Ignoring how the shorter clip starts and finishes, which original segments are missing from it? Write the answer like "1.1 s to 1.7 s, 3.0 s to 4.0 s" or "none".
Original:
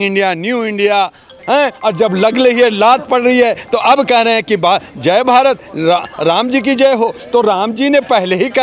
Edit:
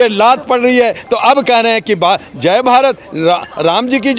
none